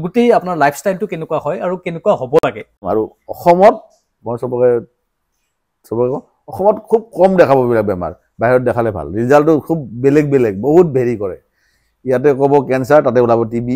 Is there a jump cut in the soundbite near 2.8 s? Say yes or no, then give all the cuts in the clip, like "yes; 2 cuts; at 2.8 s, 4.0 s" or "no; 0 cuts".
yes; 1 cut; at 2.8 s